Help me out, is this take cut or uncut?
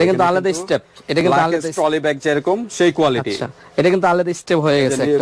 uncut